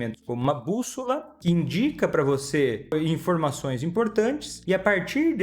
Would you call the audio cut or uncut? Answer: cut